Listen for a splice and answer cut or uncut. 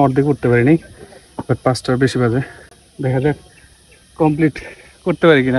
uncut